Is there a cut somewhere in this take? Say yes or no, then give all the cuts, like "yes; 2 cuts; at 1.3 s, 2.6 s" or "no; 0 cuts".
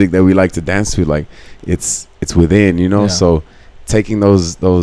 no; 0 cuts